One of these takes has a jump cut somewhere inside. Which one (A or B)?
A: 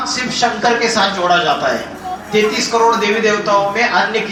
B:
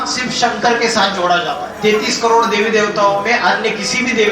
B